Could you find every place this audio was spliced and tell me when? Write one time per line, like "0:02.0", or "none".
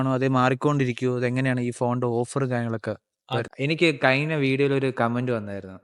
0:03.5